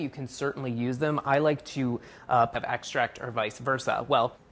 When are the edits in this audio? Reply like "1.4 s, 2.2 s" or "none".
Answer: none